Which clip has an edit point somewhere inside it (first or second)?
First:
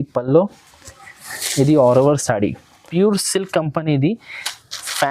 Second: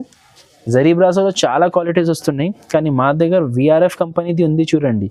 first